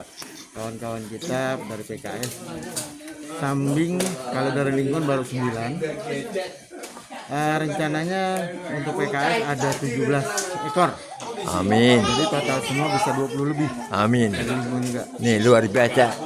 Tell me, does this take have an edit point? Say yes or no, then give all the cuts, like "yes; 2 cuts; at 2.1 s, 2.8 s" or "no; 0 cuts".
no; 0 cuts